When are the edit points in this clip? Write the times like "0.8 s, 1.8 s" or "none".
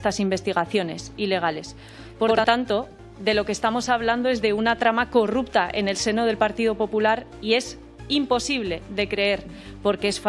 2.3 s